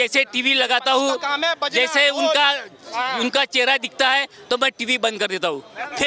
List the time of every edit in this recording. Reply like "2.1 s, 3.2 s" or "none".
none

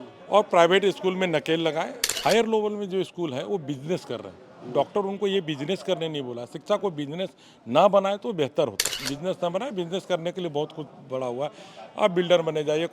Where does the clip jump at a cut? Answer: 2.0 s, 9.0 s

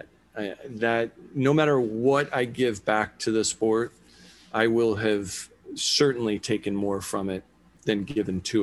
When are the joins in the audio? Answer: 7.7 s

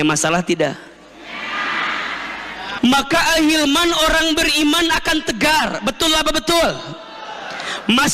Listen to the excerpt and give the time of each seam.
2.7 s

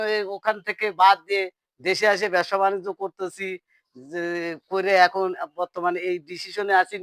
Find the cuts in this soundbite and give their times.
none

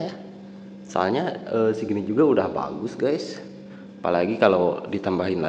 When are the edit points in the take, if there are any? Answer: none

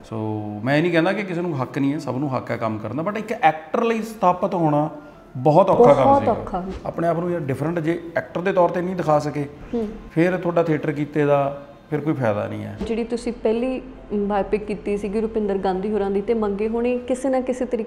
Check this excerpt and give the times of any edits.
6.7 s, 12.8 s

